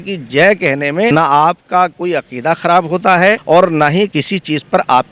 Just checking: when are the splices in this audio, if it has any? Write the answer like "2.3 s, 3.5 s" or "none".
1.1 s, 3.4 s, 4.1 s